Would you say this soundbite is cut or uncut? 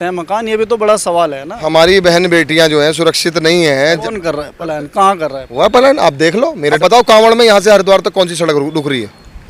cut